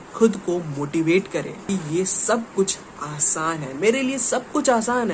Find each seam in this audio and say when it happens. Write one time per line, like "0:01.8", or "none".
0:01.6